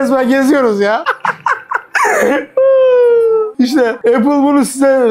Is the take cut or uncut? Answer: cut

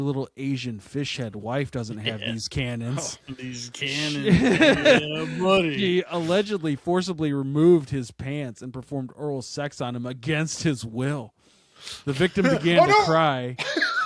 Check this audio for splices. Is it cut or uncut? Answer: uncut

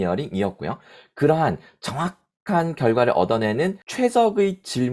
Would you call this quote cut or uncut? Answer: uncut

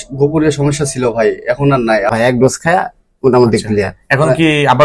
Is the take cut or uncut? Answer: cut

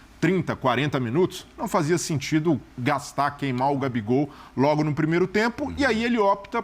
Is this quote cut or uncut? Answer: uncut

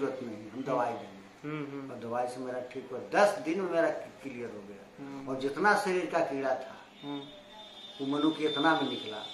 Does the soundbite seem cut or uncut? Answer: uncut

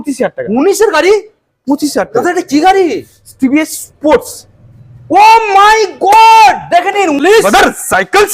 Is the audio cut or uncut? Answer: cut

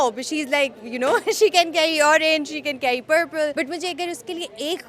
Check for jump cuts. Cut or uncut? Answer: cut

